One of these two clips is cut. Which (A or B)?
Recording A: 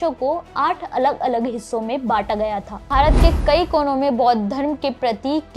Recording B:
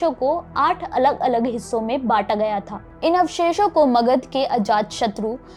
A